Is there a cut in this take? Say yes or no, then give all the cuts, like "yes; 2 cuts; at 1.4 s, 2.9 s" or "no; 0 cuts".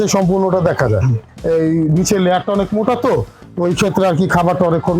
yes; 1 cut; at 1.3 s